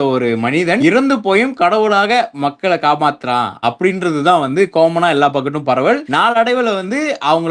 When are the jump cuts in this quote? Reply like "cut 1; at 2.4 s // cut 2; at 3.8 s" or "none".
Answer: none